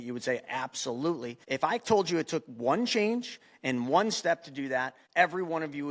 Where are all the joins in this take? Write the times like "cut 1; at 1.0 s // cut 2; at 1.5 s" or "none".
cut 1; at 1.3 s // cut 2; at 5.0 s